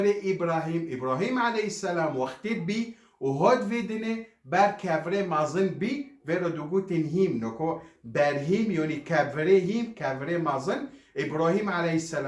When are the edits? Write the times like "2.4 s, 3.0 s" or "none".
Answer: none